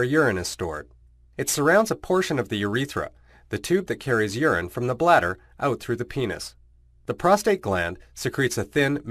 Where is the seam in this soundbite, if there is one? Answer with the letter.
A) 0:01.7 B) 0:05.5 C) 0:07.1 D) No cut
D